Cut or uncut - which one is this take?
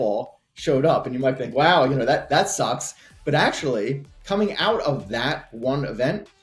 uncut